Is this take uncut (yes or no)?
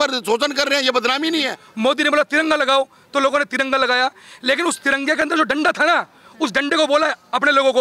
no